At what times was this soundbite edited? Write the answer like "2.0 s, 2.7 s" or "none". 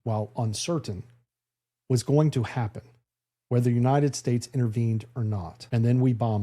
5.5 s